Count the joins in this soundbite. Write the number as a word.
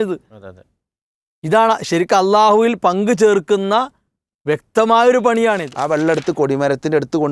one